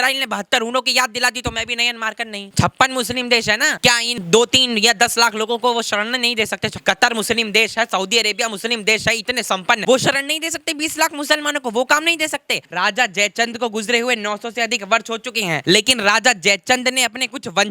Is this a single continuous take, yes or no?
no